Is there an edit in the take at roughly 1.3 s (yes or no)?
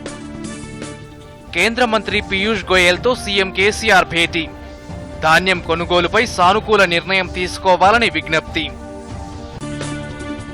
yes